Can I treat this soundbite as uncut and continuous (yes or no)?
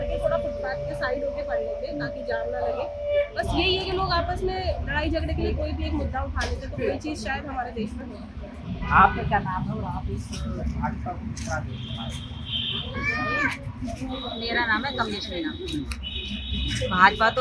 yes